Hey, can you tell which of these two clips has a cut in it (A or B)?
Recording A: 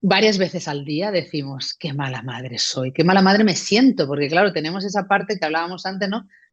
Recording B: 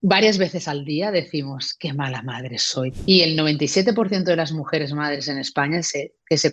B